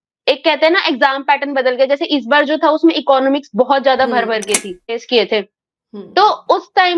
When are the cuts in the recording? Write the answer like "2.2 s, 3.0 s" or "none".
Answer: 5.0 s